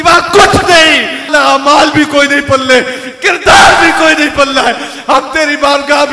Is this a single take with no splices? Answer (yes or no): no